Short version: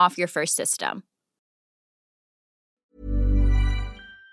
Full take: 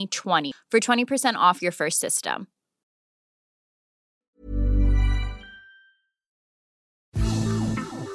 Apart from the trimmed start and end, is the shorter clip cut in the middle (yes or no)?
no